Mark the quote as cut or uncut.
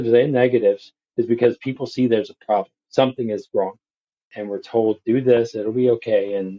uncut